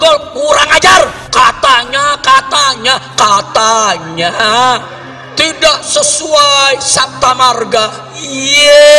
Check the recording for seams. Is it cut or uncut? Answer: cut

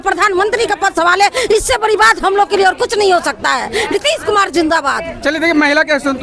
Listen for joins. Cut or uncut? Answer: uncut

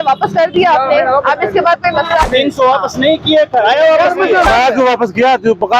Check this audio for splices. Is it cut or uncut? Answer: cut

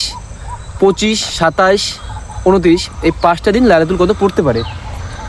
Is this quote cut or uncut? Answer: uncut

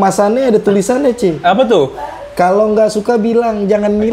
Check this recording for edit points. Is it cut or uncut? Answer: uncut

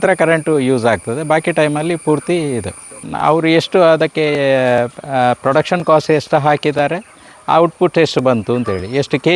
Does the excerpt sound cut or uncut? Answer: cut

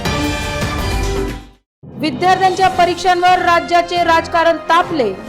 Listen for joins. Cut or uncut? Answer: cut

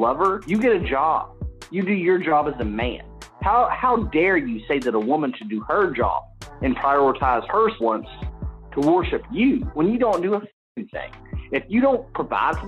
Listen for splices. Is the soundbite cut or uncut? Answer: uncut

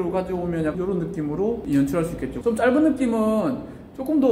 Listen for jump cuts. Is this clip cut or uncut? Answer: cut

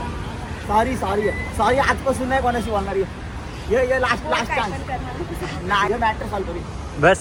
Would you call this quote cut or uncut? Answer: uncut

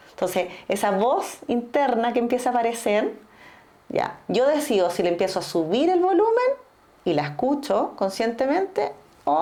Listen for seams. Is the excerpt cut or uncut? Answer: uncut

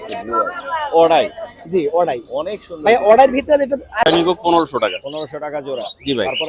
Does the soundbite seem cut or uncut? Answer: cut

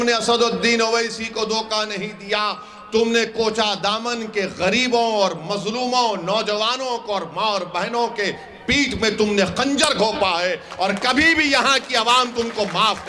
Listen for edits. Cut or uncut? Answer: uncut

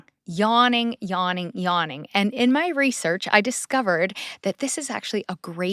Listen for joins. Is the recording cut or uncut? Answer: uncut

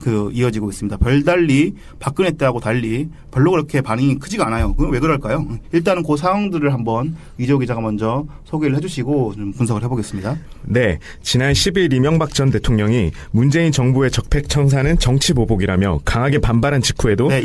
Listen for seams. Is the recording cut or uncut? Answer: cut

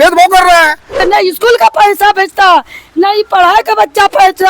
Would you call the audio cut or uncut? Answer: cut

